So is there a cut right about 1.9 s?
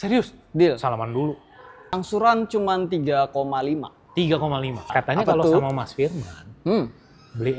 yes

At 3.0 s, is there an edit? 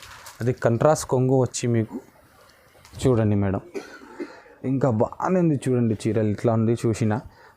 yes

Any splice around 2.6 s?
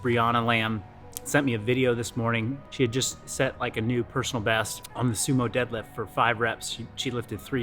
yes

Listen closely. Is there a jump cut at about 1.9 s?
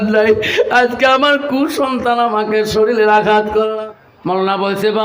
no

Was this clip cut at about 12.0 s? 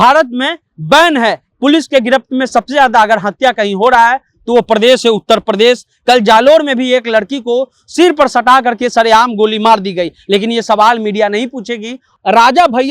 yes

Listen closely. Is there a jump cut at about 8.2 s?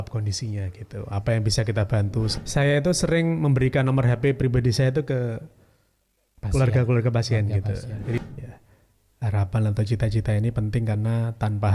yes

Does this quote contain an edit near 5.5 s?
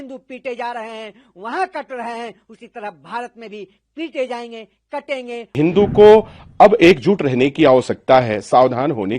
yes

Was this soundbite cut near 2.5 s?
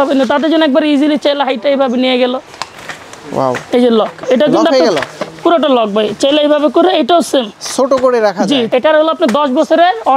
yes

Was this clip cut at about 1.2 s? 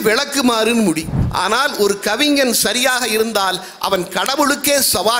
yes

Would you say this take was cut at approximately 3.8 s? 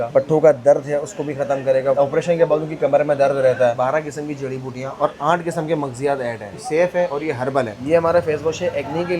yes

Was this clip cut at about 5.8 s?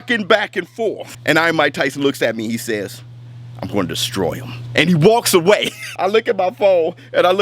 yes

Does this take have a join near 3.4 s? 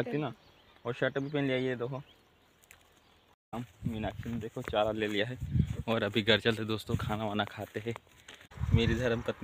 yes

